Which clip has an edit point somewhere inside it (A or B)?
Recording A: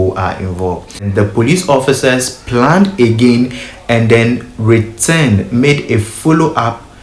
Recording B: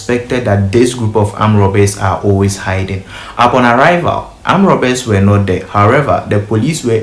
A